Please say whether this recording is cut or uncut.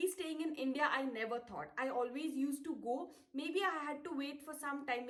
uncut